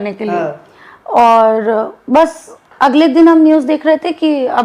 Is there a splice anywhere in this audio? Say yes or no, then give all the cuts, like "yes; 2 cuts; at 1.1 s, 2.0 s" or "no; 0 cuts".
no; 0 cuts